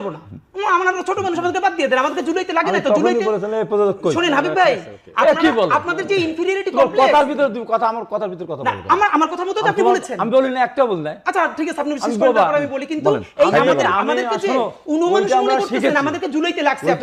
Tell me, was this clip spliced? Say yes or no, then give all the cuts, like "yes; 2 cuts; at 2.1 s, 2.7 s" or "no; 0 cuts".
no; 0 cuts